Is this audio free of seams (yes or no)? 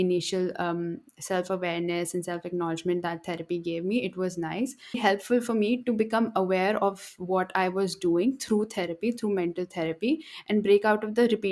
no